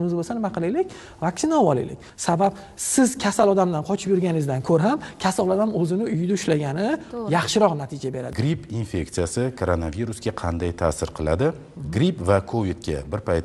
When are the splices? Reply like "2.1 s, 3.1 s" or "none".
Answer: 2.0 s, 8.3 s

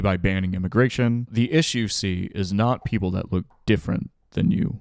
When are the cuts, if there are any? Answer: none

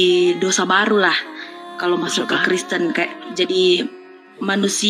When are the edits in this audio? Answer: none

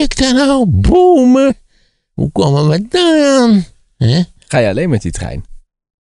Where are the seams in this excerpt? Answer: 4.4 s

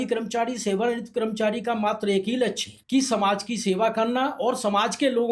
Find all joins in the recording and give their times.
2.7 s

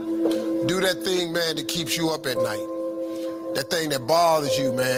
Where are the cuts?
none

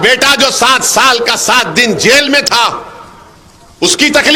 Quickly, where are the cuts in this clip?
none

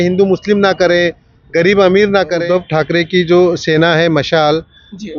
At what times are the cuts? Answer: 2.4 s

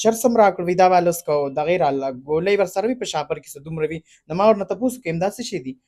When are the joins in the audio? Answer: none

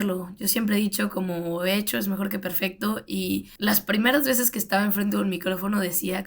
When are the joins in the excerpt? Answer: 3.5 s

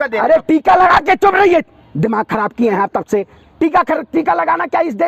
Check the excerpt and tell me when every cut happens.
none

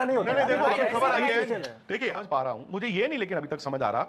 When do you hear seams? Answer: 2.2 s

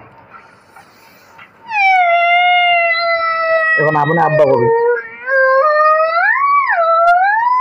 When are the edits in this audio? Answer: 1.8 s

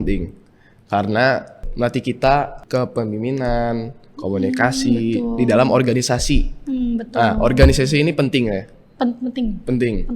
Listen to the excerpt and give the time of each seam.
1.7 s, 2.6 s

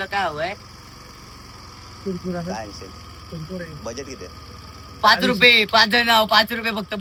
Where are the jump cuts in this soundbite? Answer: none

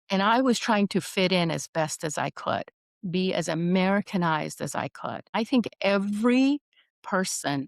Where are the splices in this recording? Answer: 5.3 s

